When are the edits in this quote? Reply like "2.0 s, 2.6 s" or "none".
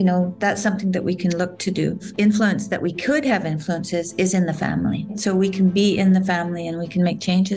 2.1 s, 5.1 s